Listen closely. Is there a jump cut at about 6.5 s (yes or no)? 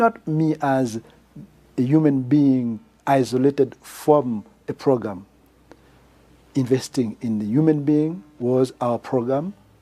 yes